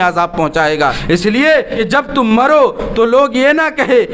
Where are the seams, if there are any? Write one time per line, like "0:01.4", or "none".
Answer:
0:01.0
0:01.7